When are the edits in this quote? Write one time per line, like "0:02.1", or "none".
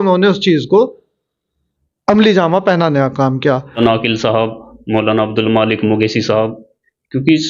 0:03.8